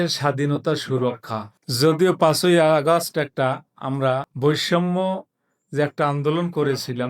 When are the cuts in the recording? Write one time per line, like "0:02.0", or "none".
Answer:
0:01.6
0:04.3